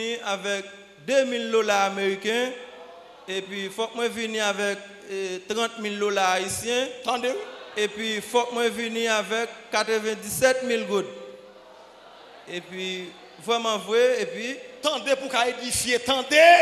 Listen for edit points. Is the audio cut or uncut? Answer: uncut